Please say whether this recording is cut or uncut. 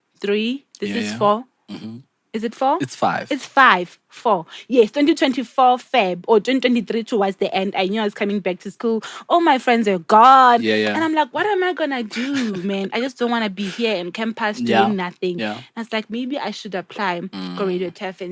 uncut